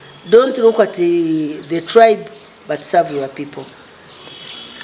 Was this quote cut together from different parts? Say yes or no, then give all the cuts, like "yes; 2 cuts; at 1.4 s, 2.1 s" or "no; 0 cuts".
no; 0 cuts